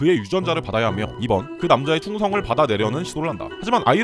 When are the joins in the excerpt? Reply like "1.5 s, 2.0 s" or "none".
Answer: 1.1 s